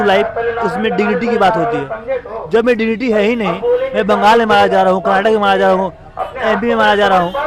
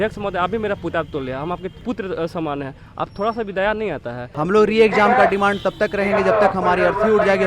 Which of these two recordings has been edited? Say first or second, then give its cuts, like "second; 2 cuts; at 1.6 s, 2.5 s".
second; 2 cuts; at 1.7 s, 4.4 s